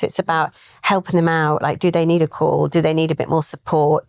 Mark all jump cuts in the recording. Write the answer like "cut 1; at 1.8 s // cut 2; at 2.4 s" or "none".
none

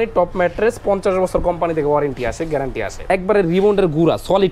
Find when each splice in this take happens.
cut 1; at 3.0 s

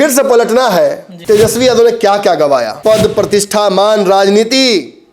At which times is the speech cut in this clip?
cut 1; at 1.1 s // cut 2; at 2.7 s

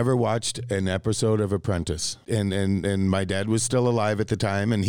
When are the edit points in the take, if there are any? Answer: cut 1; at 2.1 s

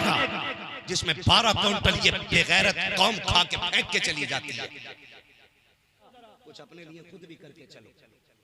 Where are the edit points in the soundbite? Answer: cut 1; at 6.1 s

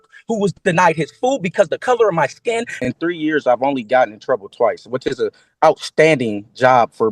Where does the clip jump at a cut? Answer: cut 1; at 2.8 s

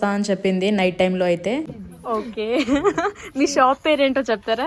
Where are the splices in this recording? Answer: cut 1; at 1.6 s

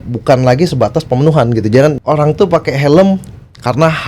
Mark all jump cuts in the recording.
cut 1; at 2.0 s

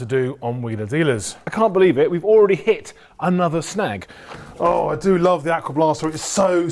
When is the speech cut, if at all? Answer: cut 1; at 1.5 s // cut 2; at 4.3 s

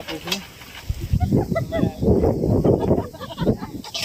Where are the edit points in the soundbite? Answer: none

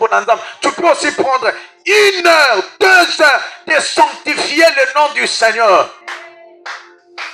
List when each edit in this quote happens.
none

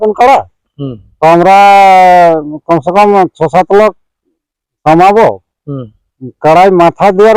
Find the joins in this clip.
none

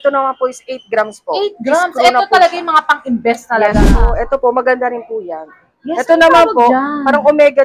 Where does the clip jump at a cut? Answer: cut 1; at 4.1 s

